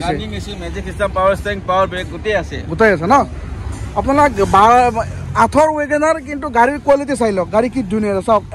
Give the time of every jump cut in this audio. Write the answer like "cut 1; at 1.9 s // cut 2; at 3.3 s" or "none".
none